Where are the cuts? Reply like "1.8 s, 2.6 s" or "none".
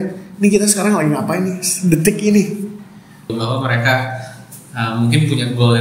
3.3 s